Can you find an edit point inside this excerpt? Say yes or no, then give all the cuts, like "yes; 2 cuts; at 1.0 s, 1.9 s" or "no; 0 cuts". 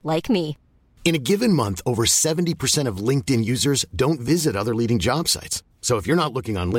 no; 0 cuts